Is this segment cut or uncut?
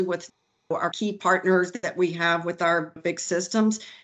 cut